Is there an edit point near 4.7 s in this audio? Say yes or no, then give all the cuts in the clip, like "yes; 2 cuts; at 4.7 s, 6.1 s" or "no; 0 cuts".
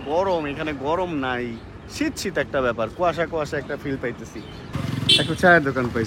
yes; 1 cut; at 4.7 s